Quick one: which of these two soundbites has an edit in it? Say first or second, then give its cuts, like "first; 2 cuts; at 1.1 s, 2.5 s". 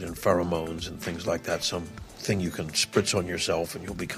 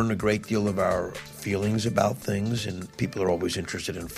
second; 2 cuts; at 1.2 s, 2.8 s